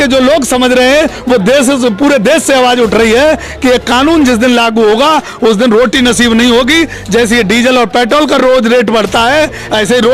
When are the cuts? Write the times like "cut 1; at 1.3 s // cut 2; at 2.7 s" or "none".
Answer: none